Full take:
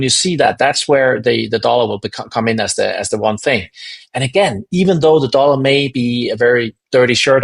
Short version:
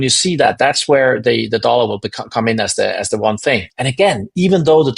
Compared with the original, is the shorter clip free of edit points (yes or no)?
no